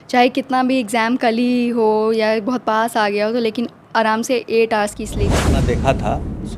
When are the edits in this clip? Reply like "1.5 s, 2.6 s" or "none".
5.4 s